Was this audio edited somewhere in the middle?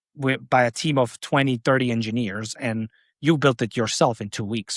no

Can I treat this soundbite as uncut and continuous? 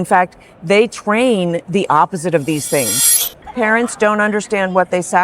no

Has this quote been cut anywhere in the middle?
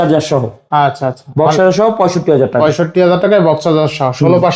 no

